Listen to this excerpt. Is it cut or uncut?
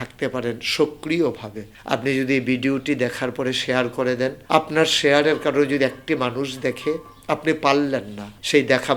cut